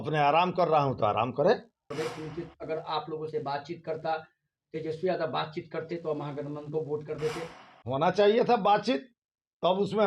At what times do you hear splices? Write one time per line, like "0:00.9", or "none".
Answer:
0:01.9